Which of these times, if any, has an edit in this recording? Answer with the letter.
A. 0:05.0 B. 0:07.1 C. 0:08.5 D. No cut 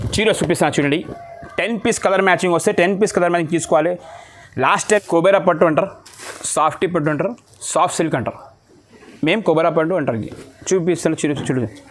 A